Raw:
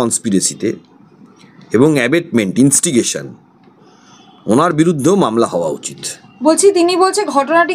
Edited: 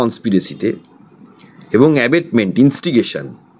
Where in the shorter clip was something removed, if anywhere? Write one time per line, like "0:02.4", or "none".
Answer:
none